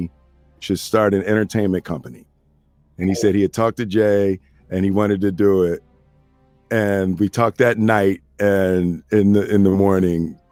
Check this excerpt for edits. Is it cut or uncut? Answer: uncut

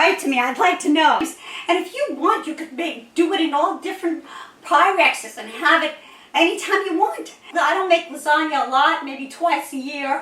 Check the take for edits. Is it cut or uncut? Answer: cut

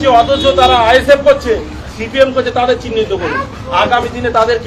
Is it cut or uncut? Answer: uncut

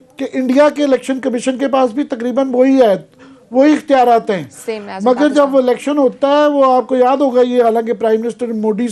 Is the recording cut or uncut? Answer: uncut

